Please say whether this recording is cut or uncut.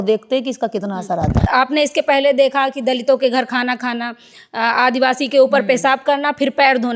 cut